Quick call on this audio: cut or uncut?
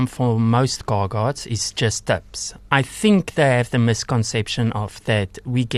uncut